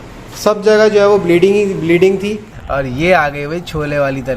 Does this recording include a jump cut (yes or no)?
yes